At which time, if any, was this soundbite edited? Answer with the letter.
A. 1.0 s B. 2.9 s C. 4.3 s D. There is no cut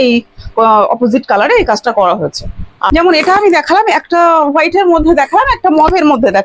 B